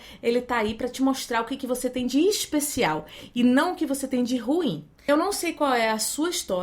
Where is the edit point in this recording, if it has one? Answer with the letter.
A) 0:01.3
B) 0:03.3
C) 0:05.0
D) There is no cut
C